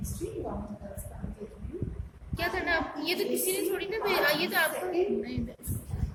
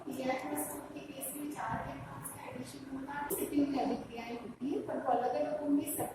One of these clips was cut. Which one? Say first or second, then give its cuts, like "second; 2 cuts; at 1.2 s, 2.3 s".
second; 1 cut; at 3.3 s